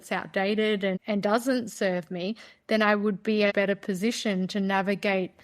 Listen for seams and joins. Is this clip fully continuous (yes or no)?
no